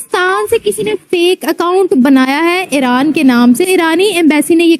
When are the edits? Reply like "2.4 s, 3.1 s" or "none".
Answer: 3.6 s